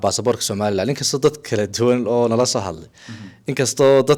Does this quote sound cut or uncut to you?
uncut